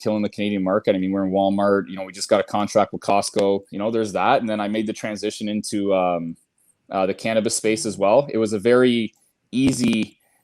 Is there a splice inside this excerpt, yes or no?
yes